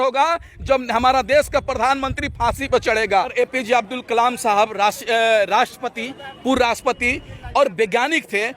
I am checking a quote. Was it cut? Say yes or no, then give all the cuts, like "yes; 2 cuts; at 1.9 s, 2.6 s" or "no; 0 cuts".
yes; 1 cut; at 3.3 s